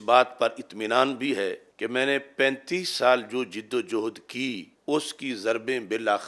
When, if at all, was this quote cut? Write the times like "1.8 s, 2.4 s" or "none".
1.7 s, 4.7 s